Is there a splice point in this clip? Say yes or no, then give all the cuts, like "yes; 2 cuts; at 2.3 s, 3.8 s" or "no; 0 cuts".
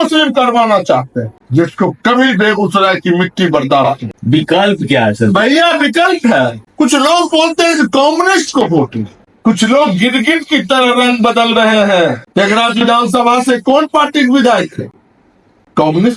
no; 0 cuts